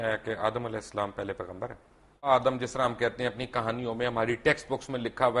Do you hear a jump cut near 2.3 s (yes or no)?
yes